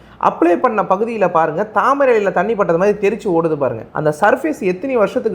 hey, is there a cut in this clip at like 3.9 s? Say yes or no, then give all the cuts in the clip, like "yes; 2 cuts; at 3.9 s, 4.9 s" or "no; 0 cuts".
yes; 1 cut; at 3.9 s